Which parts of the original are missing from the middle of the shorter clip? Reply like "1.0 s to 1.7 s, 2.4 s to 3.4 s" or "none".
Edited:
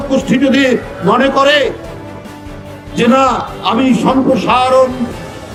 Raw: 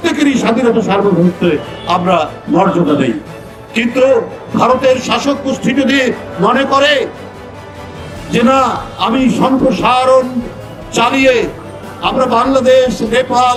none

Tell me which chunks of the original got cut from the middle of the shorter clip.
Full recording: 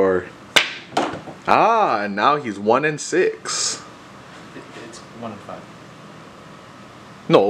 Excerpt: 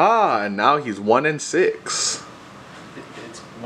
none

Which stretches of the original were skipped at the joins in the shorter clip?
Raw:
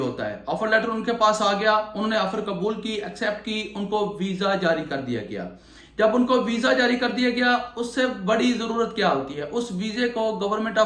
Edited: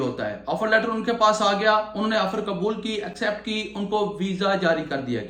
none

